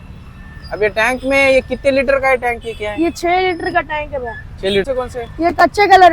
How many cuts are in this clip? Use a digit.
1